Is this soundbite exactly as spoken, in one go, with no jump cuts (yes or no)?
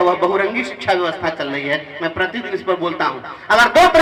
yes